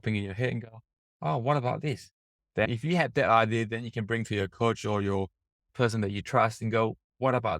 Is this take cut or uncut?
cut